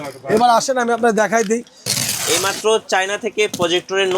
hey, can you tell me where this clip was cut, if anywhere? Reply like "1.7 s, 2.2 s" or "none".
1.8 s